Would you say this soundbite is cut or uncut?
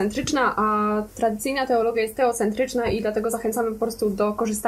uncut